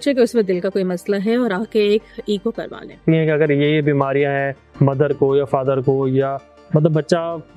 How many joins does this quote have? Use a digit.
1